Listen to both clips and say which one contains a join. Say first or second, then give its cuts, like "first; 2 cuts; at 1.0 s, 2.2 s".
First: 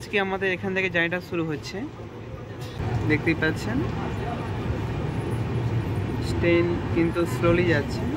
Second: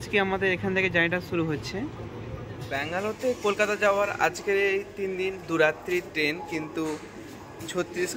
second; 1 cut; at 3.0 s